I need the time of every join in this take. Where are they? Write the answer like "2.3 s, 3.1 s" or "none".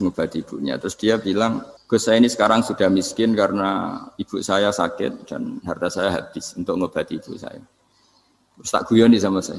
1.7 s